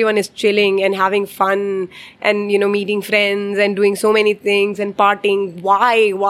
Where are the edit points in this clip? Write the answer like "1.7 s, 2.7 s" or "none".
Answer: none